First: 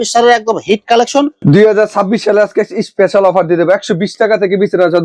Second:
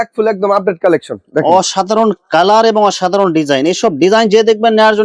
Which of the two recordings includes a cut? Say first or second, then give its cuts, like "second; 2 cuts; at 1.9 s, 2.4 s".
first; 1 cut; at 1.3 s